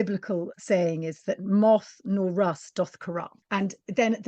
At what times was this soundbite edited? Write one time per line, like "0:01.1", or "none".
0:03.3